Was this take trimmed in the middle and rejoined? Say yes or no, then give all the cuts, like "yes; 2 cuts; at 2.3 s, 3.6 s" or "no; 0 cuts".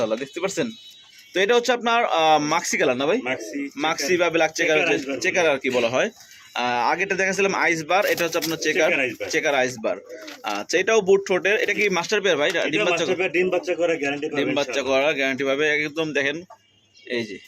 no; 0 cuts